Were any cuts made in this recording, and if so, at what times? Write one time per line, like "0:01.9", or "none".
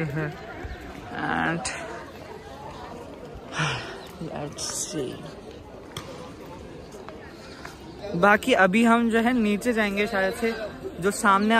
0:08.0

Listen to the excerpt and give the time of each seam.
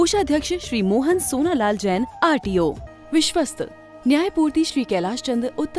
0:02.9

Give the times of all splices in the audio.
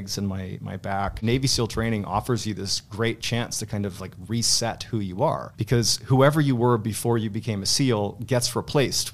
0:01.2
0:05.5

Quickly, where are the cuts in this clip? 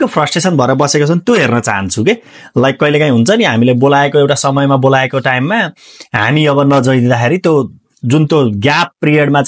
none

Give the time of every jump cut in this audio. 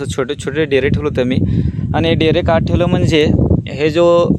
none

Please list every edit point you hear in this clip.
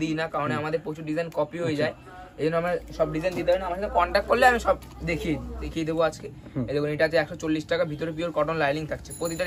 0:05.6

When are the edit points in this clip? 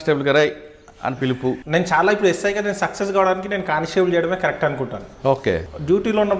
0:01.6
0:05.6

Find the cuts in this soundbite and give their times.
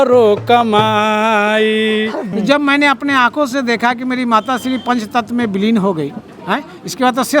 0:02.3

